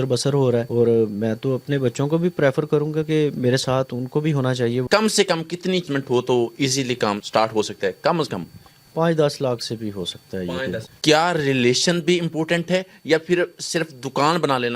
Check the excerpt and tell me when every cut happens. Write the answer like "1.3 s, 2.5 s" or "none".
4.8 s, 5.9 s, 7.2 s, 10.9 s